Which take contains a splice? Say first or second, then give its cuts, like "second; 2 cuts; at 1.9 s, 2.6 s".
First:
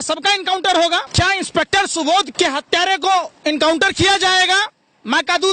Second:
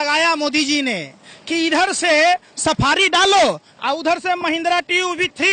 first; 2 cuts; at 1.1 s, 2.3 s